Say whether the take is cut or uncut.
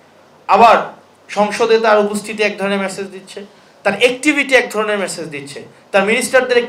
uncut